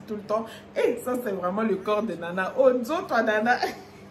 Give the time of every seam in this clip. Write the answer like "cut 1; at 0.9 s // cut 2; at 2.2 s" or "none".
none